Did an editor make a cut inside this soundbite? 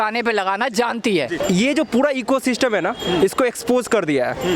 yes; 1 cut; at 1.4 s

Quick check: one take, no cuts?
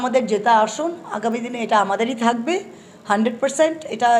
yes; 0 cuts

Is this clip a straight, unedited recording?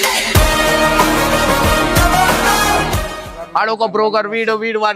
no; 1 cut; at 3.3 s

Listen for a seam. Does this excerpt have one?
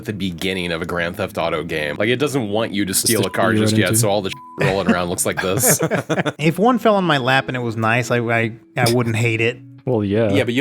yes; 3 cuts; at 1.9 s, 6.3 s, 8.6 s

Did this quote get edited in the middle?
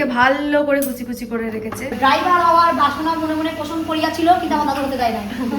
yes; 1 cut; at 1.9 s

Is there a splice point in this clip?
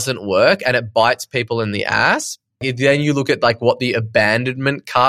yes; 1 cut; at 2.6 s

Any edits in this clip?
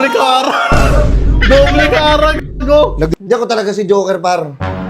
yes; 1 cut; at 3.1 s

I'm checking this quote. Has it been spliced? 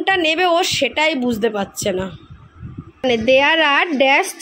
yes; 1 cut; at 3.0 s

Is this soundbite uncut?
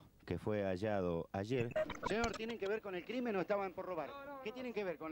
no; 1 cut; at 1.9 s

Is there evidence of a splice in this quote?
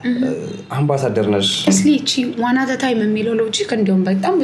yes; 1 cut; at 1.7 s

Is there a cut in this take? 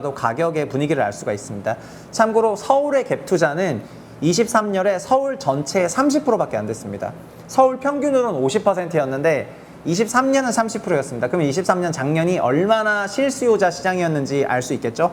no; 0 cuts

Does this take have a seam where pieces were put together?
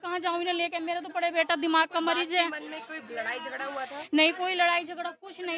no; 0 cuts

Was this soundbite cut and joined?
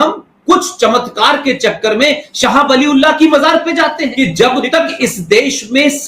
yes; 1 cut; at 4.1 s

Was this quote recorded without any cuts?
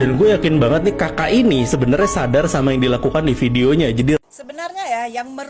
yes; 0 cuts

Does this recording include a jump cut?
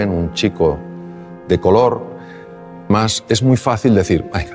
yes; 1 cut; at 2.9 s

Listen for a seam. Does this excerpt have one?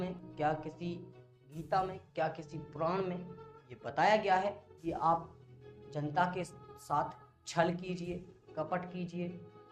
no; 0 cuts

